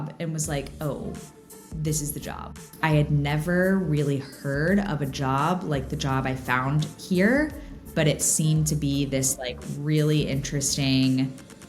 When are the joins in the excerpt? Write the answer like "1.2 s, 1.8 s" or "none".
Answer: 2.4 s